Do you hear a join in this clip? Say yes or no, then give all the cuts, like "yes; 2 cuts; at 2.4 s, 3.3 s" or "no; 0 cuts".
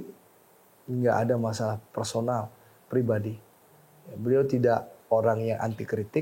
no; 0 cuts